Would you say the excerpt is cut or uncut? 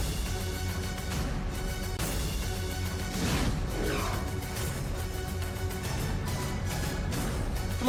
uncut